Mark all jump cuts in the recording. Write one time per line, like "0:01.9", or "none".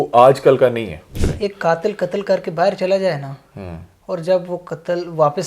0:01.1

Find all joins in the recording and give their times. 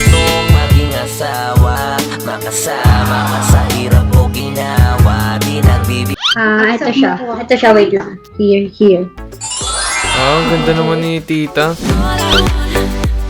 0:06.1

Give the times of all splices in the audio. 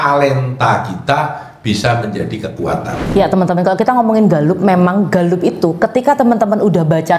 0:03.0

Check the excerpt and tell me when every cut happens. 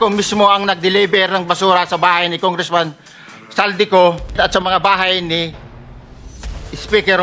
none

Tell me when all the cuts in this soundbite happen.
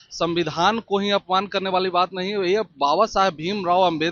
none

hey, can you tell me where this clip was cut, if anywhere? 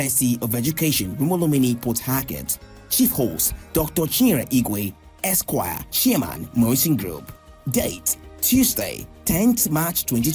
none

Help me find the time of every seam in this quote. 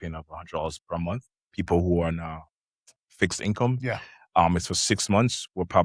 none

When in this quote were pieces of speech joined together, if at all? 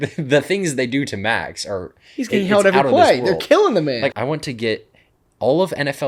0:04.1

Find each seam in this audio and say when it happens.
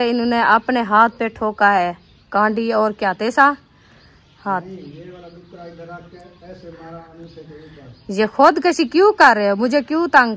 none

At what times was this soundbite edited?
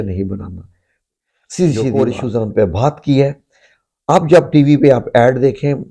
0:02.0

